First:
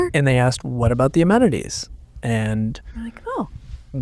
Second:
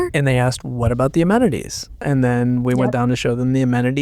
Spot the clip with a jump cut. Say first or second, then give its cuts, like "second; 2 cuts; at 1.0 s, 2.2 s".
second; 1 cut; at 2.0 s